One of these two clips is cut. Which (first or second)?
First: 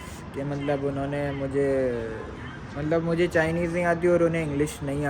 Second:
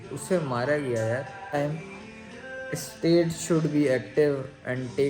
second